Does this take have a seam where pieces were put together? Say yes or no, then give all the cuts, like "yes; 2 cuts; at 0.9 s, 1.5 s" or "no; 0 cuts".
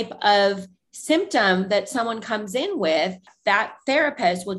yes; 1 cut; at 3.3 s